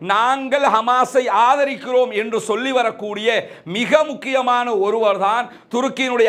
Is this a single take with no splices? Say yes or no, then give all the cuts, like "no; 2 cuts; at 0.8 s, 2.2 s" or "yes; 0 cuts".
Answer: yes; 0 cuts